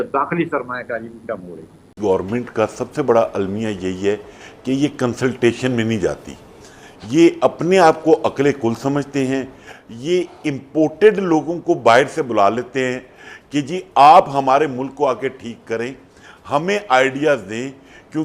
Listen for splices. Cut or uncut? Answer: cut